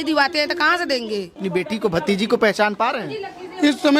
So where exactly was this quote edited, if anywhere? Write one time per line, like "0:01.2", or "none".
0:01.4